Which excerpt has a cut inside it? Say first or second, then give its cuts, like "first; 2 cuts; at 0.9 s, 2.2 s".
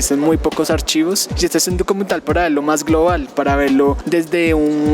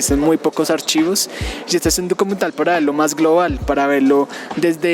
first; 2 cuts; at 1.3 s, 4.0 s